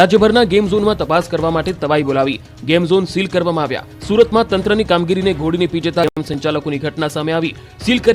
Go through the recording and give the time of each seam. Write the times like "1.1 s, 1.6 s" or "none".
2.8 s